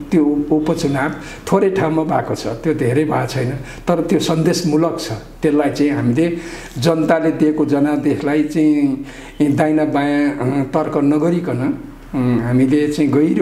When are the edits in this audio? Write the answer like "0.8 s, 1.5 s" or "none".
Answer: none